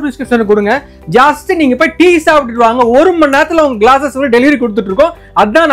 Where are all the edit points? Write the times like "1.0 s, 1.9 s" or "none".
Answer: none